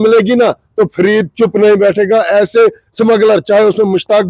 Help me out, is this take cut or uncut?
uncut